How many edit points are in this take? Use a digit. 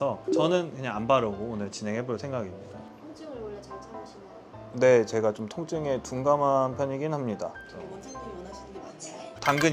0